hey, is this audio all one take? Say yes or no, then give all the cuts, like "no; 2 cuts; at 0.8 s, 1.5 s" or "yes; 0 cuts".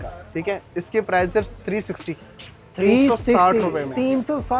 yes; 0 cuts